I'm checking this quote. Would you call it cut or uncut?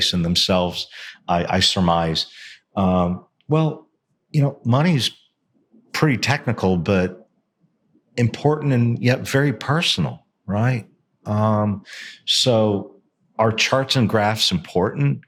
uncut